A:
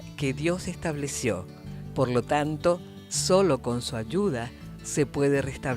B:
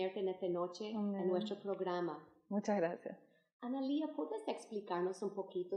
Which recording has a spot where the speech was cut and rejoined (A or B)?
A